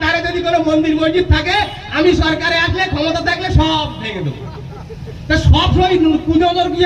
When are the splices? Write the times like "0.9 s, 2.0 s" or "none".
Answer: none

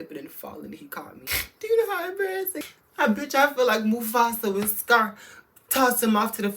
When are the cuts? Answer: 1.2 s, 2.5 s

